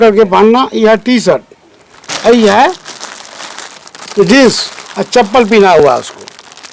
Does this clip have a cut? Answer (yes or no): no